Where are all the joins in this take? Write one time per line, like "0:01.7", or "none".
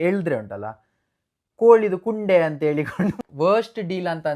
0:03.2